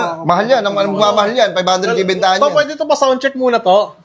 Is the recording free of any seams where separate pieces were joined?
yes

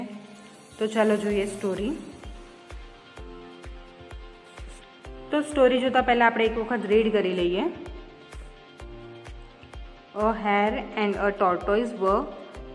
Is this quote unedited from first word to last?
no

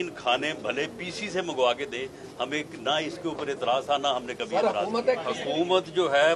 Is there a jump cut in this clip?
yes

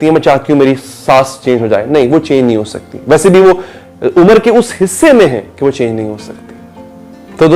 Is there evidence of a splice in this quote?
no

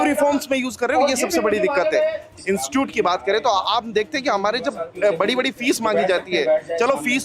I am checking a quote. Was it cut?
yes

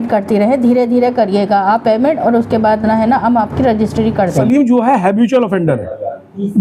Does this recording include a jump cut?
yes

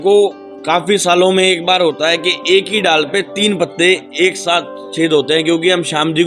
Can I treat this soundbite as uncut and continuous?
yes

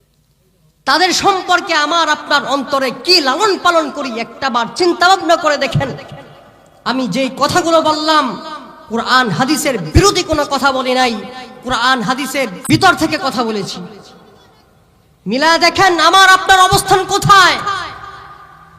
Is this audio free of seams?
no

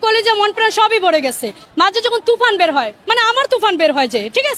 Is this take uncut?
no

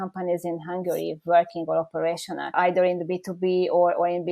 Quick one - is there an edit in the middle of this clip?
yes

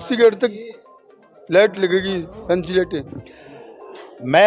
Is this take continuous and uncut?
yes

